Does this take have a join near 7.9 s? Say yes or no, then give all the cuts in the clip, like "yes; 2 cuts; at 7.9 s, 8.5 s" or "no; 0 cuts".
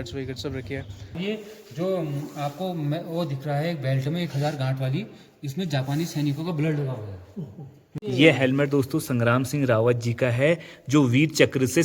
yes; 2 cuts; at 1.2 s, 7.9 s